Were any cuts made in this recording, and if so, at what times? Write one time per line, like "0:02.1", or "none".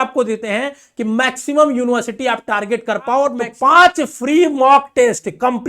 0:03.5